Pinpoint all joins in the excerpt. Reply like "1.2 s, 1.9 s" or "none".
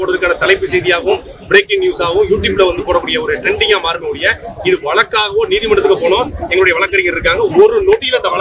none